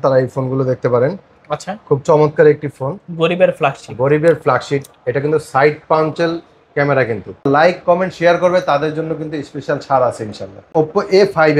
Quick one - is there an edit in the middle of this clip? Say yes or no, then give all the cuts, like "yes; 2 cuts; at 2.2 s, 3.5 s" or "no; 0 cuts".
yes; 2 cuts; at 7.4 s, 10.5 s